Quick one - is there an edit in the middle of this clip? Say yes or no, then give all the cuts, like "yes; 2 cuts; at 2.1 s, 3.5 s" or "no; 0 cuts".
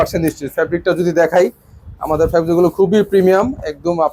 no; 0 cuts